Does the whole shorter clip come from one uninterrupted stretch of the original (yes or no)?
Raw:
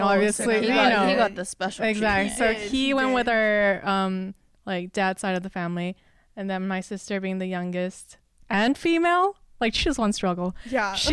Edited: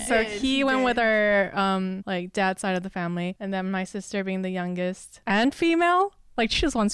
no